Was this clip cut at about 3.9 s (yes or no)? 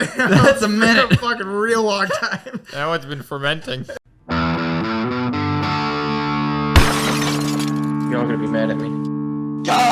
yes